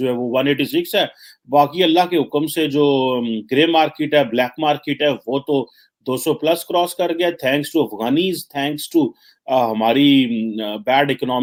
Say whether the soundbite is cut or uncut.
uncut